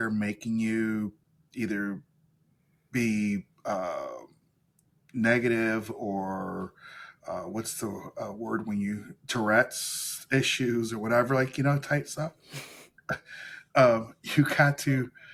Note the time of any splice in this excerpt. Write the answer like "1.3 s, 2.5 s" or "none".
none